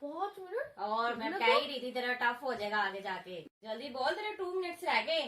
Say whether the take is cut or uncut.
cut